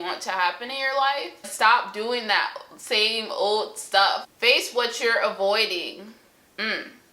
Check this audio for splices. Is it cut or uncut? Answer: cut